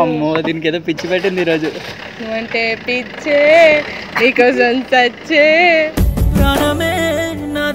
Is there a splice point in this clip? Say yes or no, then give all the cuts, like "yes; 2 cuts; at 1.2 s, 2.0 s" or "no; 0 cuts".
no; 0 cuts